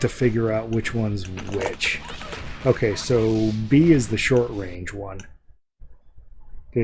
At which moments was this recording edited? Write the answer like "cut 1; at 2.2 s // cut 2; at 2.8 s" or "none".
none